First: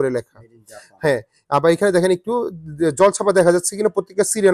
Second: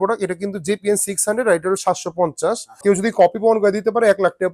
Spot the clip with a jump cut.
second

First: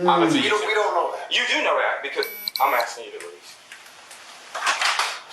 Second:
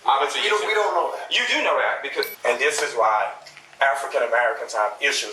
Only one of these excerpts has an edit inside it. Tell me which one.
second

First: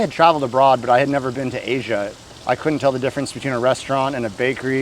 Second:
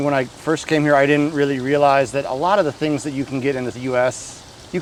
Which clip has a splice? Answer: first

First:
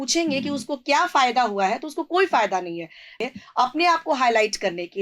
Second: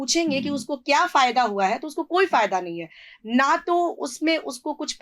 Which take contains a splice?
first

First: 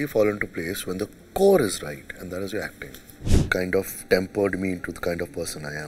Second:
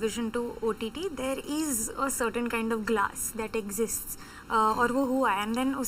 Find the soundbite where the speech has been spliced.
first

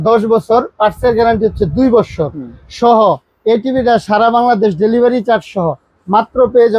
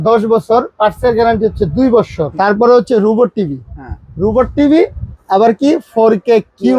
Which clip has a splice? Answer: second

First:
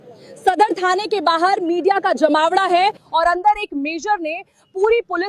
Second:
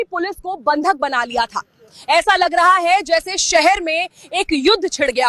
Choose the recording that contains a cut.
first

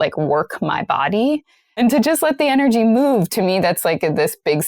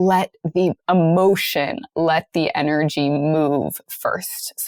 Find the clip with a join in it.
first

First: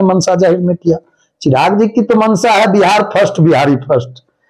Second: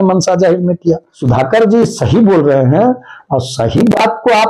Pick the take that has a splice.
second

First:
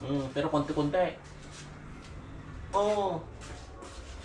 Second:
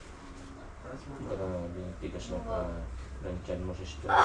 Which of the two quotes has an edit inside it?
first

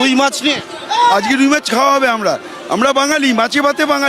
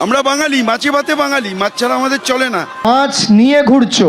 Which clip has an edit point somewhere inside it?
second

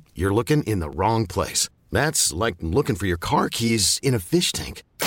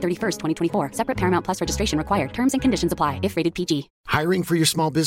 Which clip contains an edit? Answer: second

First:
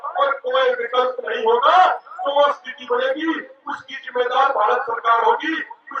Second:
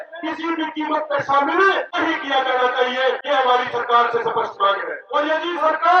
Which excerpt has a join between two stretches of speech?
second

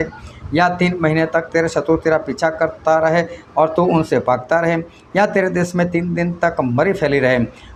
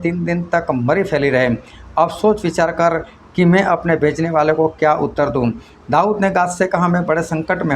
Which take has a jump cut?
second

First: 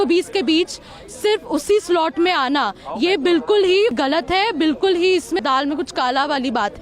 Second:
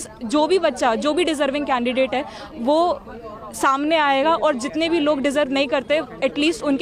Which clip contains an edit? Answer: first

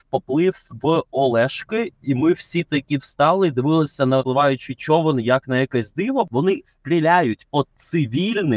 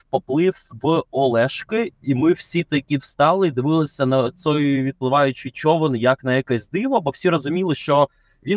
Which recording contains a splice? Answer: first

